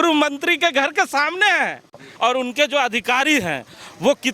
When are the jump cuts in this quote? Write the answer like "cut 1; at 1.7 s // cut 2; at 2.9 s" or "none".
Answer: cut 1; at 2.0 s